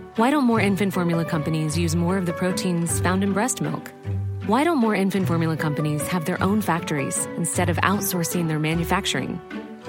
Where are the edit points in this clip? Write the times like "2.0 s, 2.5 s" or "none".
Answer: none